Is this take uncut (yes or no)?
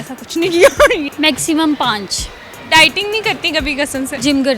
no